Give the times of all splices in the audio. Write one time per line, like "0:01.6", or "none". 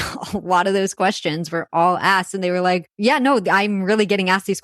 0:02.9